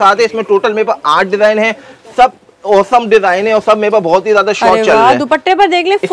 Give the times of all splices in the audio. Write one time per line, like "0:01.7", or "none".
none